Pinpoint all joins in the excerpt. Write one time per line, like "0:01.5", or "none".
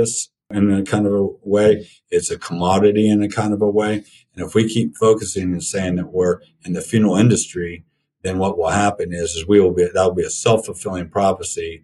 none